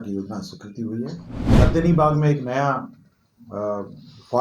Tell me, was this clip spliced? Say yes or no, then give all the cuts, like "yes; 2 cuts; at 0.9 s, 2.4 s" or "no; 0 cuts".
yes; 1 cut; at 1.6 s